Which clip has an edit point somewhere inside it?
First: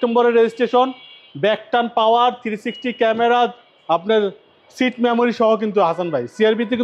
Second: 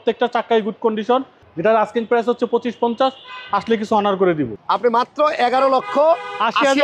second; 2 cuts; at 1.4 s, 4.5 s

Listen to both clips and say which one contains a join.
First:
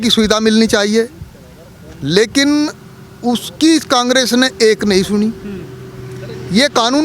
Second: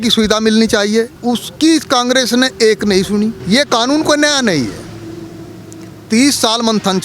second; 2 cuts; at 1.1 s, 3.4 s

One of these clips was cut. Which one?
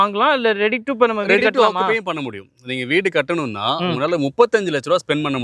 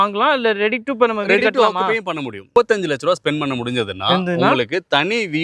second; 1 cut; at 2.5 s

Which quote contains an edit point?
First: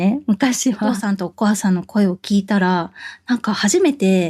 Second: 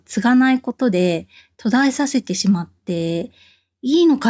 first; 1 cut; at 1.0 s

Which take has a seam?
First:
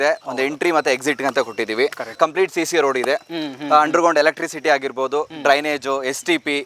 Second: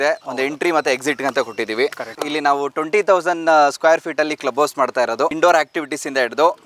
second; 2 cuts; at 2.1 s, 5.3 s

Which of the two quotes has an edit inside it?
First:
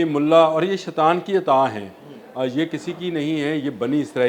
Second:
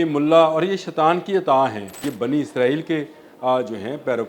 second; 1 cut; at 2.0 s

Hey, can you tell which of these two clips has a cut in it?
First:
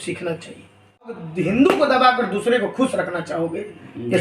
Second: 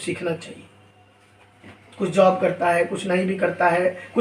first; 1 cut; at 1.3 s

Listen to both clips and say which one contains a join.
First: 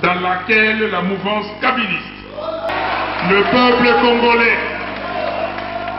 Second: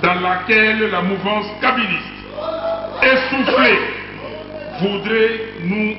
first; 1 cut; at 2.7 s

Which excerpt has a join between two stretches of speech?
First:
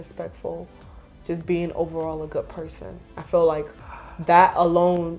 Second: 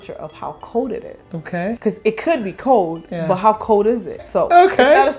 second; 2 cuts; at 1.8 s, 4.2 s

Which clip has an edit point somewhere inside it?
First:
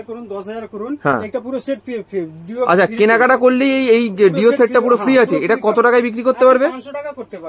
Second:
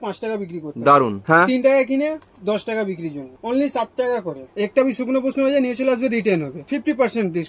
second; 4 cuts; at 1.2 s, 3.3 s, 4.5 s, 6.6 s

